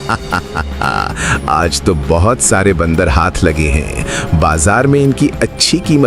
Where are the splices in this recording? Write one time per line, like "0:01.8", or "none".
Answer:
none